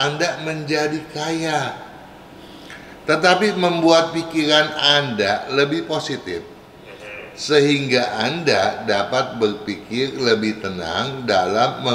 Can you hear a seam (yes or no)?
no